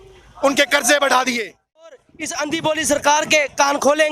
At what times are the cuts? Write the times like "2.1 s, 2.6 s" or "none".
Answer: 2.0 s